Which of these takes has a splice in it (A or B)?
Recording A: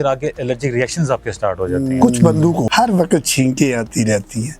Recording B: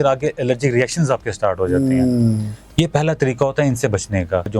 A